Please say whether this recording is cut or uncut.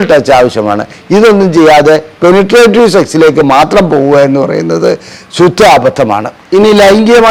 uncut